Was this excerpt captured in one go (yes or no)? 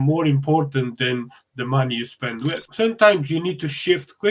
no